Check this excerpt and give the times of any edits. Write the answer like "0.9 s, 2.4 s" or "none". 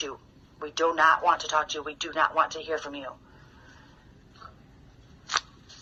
none